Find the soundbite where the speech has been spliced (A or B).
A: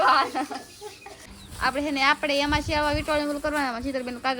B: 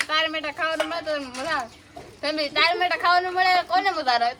A